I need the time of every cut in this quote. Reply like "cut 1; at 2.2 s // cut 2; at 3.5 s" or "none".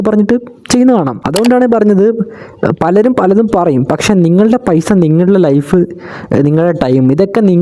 cut 1; at 1.2 s